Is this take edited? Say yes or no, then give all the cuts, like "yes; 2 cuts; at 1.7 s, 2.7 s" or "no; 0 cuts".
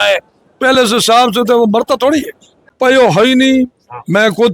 yes; 1 cut; at 2.7 s